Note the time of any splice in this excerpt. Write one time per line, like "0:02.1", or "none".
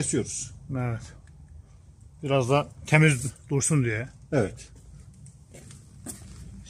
none